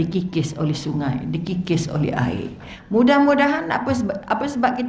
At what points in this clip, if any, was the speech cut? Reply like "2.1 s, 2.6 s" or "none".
2.7 s